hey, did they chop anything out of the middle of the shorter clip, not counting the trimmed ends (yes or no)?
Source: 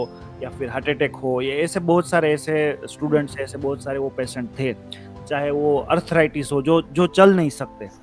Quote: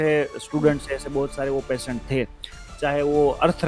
no